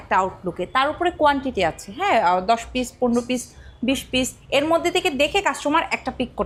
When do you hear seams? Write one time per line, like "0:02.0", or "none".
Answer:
none

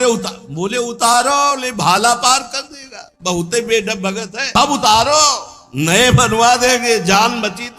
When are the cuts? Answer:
0:04.4

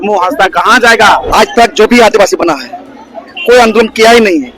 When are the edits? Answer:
0:01.3

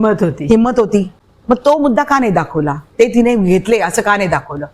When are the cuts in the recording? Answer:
0:01.1

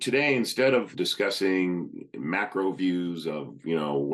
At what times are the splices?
0:00.9

